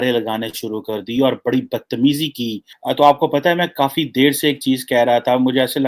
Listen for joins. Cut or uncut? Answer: uncut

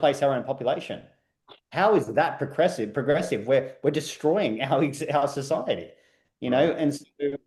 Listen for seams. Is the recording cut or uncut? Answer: uncut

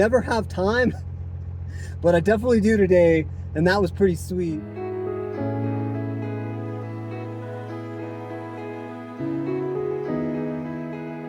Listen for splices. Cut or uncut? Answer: uncut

